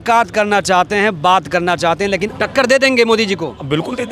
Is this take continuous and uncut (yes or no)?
no